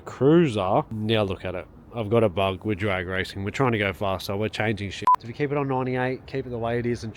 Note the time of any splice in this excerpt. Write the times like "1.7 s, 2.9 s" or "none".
0.9 s, 5.0 s

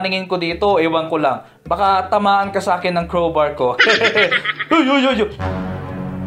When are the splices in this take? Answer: 5.4 s

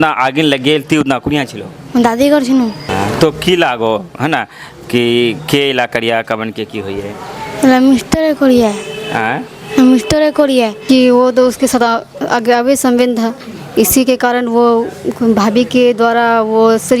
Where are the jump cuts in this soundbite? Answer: 2.9 s, 10.8 s

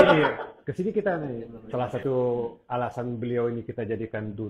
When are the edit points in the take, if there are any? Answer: 1.5 s

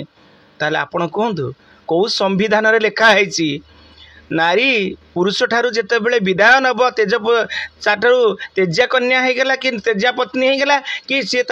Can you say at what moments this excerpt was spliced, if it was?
none

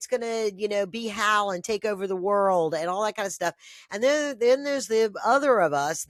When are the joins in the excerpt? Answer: none

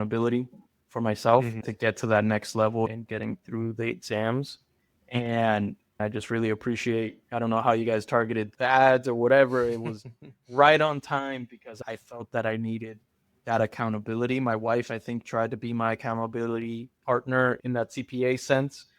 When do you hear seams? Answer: 1.6 s, 2.9 s, 6.0 s, 8.5 s, 11.8 s, 17.6 s

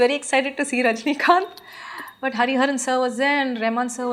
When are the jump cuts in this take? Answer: none

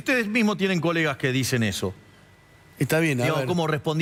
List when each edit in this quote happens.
none

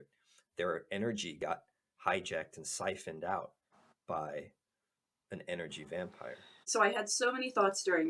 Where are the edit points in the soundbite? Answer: 6.7 s

